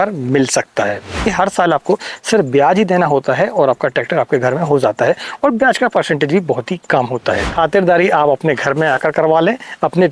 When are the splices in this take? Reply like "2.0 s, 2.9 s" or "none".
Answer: 1.2 s, 7.5 s

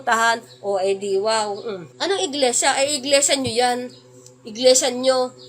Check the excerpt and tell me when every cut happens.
1.9 s

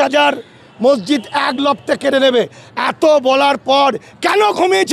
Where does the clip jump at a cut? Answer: none

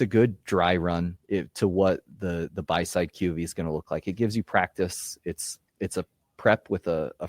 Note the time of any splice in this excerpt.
1.1 s

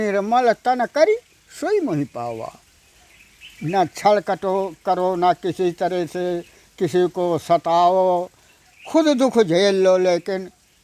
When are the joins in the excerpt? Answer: none

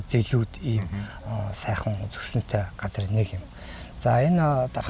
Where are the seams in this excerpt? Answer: none

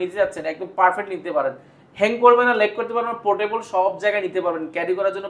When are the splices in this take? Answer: none

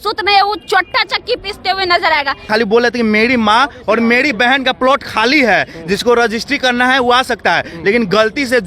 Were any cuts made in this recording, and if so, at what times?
2.4 s

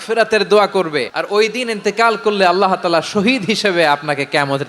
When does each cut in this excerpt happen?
1.2 s

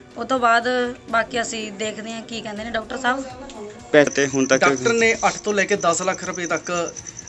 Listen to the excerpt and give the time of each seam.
4.1 s

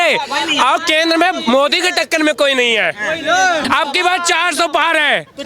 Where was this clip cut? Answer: 3.7 s

